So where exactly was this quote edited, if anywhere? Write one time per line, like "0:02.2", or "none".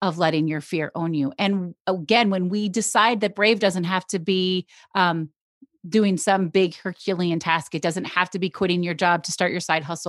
none